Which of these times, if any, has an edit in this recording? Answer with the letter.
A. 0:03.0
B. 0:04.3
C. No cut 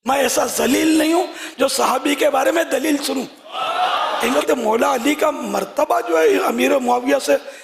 B